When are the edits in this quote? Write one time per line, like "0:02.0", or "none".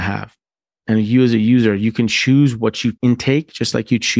0:03.0